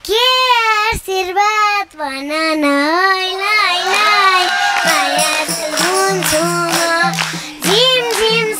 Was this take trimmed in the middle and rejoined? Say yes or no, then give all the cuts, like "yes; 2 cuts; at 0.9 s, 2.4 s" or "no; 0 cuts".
no; 0 cuts